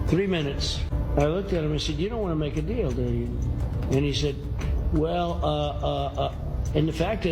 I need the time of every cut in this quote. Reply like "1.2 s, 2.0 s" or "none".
0.9 s